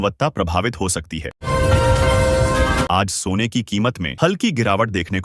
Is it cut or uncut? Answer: cut